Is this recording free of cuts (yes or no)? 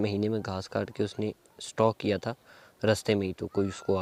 yes